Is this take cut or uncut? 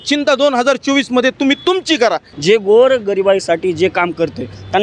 cut